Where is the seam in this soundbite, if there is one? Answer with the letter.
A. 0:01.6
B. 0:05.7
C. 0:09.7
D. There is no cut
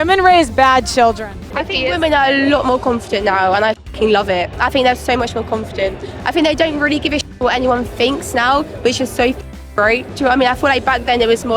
A